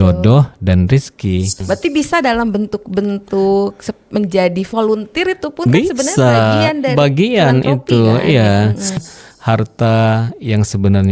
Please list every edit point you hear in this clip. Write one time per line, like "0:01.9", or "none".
0:01.6
0:09.0